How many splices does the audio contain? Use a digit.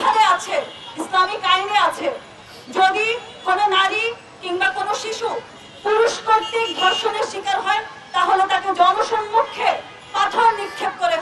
0